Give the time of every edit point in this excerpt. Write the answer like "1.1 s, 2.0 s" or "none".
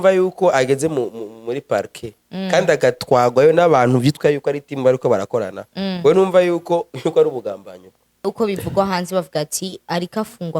8.3 s